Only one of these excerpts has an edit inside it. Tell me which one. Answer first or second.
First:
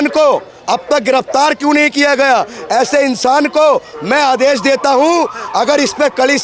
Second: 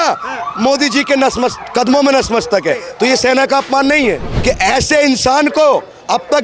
second